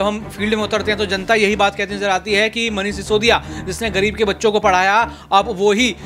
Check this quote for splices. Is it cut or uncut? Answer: uncut